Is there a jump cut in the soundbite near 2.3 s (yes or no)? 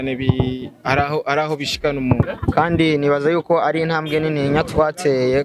yes